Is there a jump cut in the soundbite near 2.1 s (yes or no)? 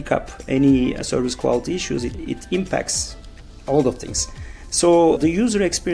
yes